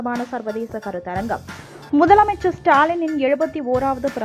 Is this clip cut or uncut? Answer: cut